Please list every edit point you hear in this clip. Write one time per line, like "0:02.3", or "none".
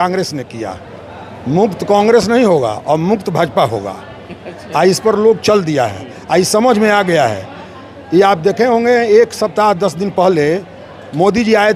none